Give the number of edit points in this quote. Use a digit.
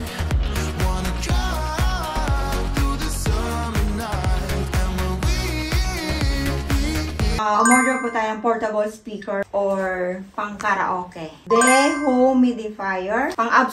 2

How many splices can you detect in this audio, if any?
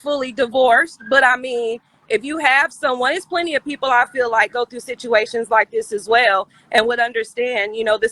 1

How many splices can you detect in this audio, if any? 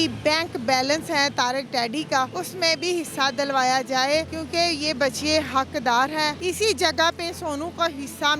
3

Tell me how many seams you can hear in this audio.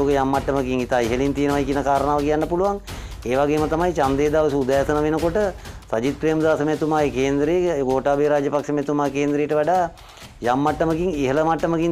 0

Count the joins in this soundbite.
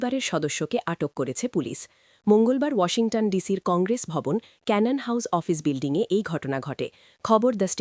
0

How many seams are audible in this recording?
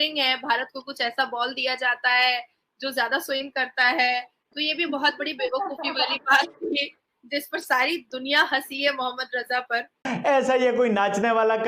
1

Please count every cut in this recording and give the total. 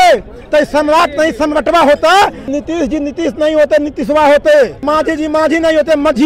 2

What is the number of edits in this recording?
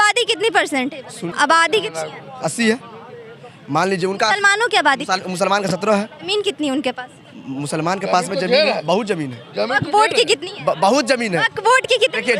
2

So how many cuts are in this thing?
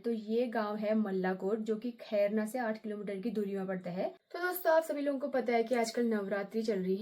1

